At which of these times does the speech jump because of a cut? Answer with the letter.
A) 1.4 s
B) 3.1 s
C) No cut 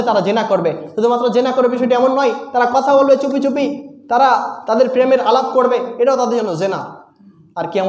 C